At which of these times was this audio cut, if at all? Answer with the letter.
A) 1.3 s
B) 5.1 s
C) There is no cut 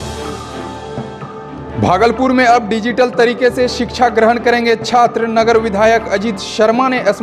A